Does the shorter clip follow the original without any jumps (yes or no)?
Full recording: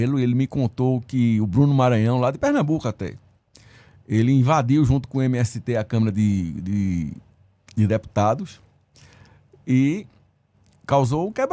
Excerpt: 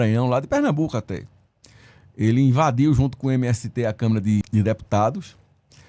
no